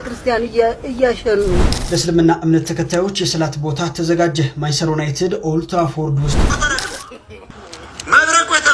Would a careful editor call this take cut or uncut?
cut